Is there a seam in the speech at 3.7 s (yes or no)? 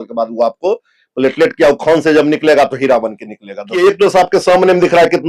yes